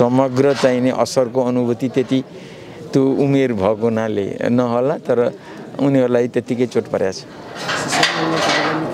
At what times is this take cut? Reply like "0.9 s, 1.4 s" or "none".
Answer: none